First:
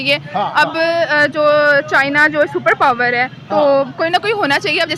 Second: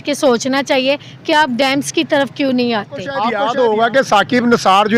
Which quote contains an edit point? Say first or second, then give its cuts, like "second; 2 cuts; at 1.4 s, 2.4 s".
second; 1 cut; at 3.2 s